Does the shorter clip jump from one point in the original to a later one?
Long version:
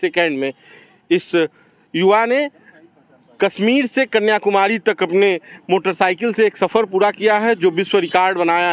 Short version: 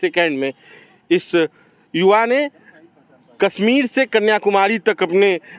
no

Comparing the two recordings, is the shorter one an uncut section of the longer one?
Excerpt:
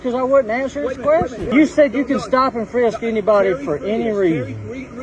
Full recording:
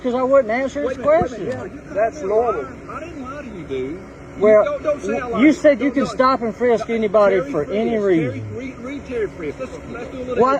no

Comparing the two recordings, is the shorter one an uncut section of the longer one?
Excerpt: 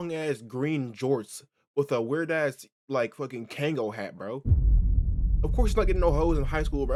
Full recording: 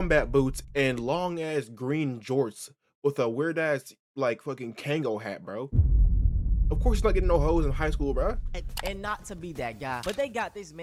yes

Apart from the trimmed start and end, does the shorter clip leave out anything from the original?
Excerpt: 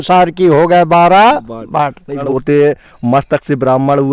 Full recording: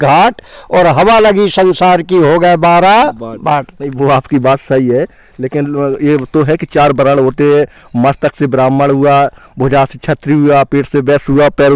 yes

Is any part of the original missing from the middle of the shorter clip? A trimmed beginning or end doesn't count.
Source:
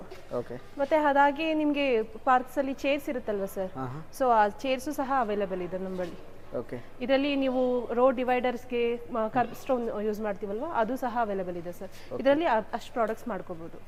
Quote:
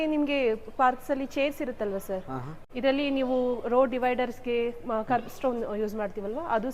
yes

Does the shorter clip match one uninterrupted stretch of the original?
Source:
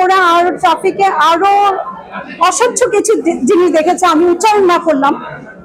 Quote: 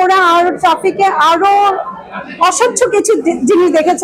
yes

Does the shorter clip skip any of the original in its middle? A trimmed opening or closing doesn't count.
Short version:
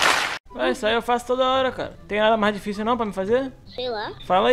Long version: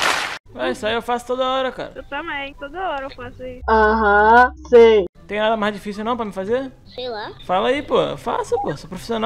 yes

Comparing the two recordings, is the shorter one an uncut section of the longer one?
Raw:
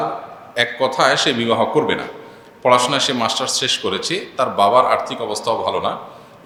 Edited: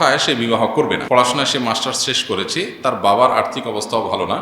no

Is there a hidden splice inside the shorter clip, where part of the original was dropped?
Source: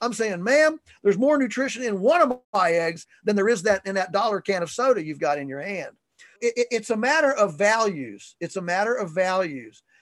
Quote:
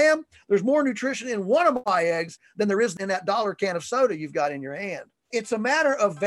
yes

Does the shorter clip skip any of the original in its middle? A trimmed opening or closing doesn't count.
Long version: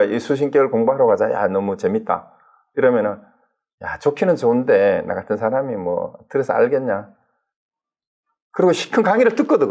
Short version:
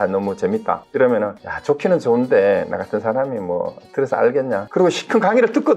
yes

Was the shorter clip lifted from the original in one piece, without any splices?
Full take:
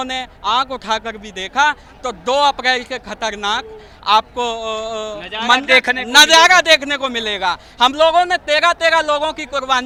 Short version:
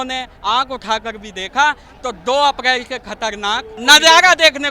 no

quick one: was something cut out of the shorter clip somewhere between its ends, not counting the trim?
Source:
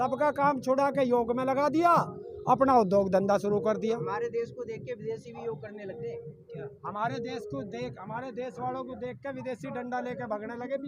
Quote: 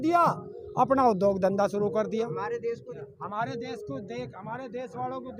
yes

